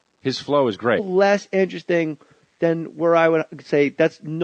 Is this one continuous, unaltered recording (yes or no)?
yes